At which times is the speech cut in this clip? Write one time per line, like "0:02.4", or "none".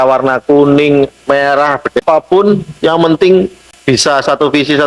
0:02.0
0:03.7

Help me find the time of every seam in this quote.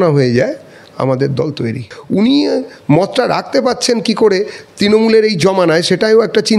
0:01.9

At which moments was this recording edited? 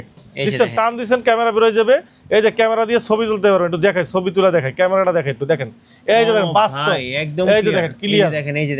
none

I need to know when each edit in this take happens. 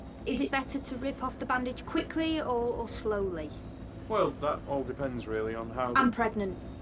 none

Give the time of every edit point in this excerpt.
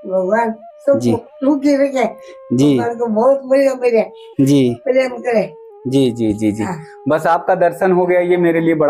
none

